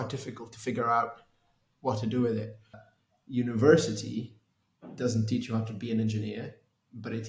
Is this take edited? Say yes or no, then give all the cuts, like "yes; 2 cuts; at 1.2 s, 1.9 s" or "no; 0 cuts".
yes; 1 cut; at 2.9 s